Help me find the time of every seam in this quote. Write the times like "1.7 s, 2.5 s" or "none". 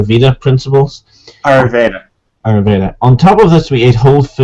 2.1 s

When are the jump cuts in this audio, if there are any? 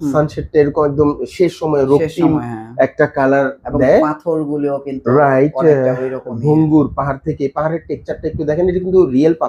none

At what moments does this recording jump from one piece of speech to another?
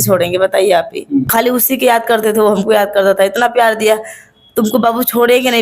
1.3 s

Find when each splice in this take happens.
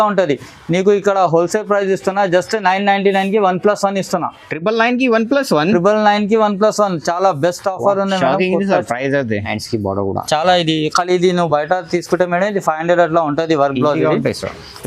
9.6 s

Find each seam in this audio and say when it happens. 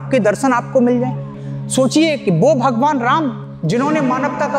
1.3 s

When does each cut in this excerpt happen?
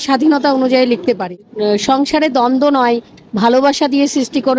1.2 s

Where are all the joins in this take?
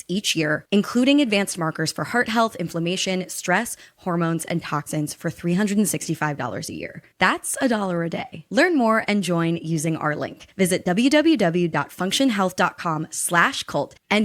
none

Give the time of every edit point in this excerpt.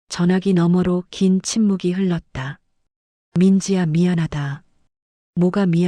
none

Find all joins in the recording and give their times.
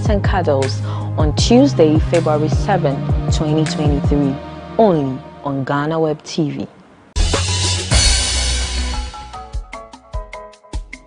7.0 s, 8.7 s

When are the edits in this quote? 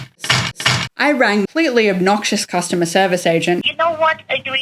1.4 s, 3.7 s

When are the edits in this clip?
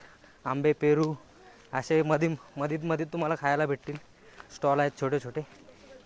none

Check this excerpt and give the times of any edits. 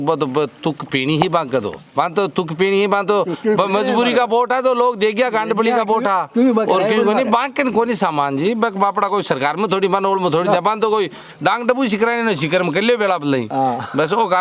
none

